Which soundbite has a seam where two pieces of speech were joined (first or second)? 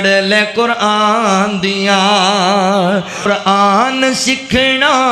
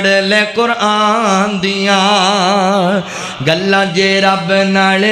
first